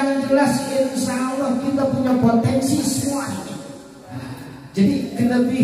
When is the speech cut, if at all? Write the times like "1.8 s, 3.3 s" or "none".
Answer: 4.3 s